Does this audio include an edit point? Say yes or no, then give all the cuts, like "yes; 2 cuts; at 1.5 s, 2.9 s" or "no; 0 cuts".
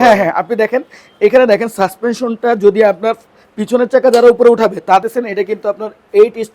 yes; 1 cut; at 5.0 s